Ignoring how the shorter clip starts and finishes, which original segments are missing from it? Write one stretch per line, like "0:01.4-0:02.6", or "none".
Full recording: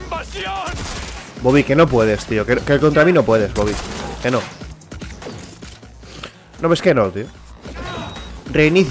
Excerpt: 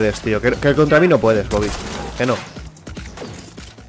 none